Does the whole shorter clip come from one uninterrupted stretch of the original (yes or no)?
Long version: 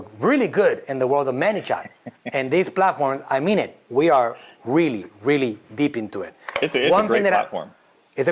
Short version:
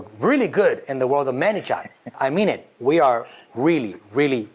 no